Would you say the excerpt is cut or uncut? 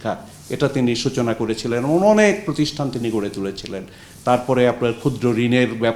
uncut